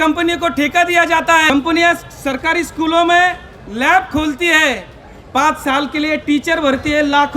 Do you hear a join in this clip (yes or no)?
yes